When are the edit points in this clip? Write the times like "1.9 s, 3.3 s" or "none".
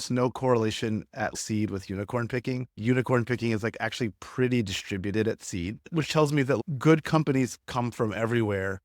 1.3 s, 2.8 s